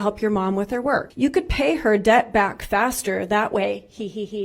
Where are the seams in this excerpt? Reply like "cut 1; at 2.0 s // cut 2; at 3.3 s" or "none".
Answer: cut 1; at 1.1 s